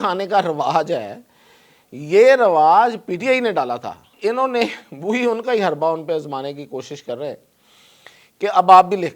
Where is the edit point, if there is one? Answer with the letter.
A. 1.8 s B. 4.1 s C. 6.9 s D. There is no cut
B